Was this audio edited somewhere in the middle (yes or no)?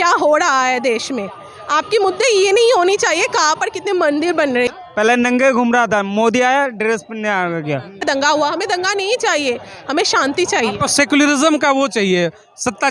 yes